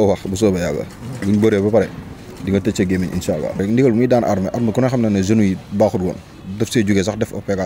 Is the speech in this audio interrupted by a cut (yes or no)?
yes